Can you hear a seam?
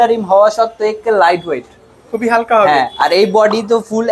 no; 0 cuts

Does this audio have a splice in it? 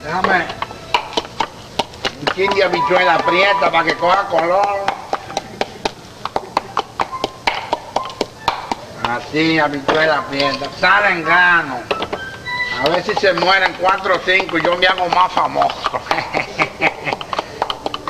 no; 0 cuts

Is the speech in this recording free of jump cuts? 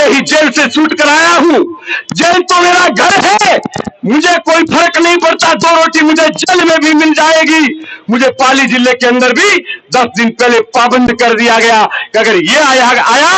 yes; 0 cuts

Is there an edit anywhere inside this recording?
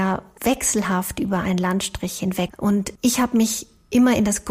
yes; 1 cut; at 2.5 s

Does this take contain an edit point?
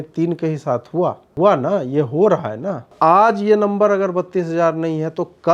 yes; 2 cuts; at 1.3 s, 2.9 s

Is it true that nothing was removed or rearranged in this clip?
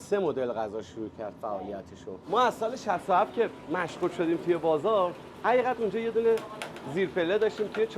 no; 1 cut; at 2.2 s

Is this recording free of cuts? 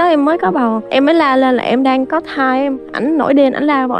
no; 2 cuts; at 0.8 s, 2.7 s

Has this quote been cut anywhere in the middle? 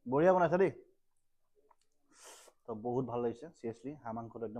no; 0 cuts

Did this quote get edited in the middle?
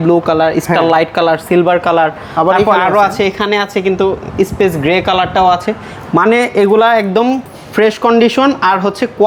no; 0 cuts

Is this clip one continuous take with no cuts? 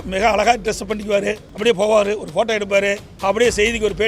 no; 2 cuts; at 1.5 s, 3.1 s

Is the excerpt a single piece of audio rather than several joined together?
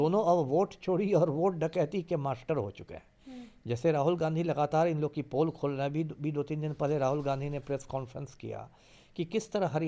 yes; 0 cuts

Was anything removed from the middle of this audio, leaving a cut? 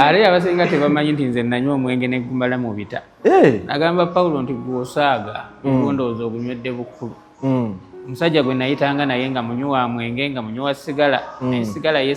no; 0 cuts

